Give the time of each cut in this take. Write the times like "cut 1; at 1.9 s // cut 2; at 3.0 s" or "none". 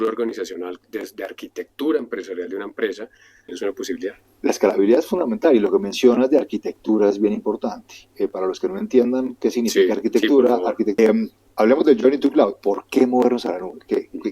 cut 1; at 3.5 s // cut 2; at 11.0 s